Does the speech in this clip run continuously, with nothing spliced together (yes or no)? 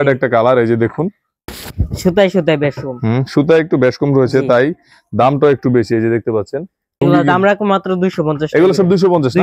no